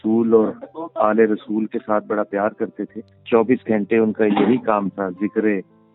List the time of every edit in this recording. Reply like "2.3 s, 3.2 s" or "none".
3.1 s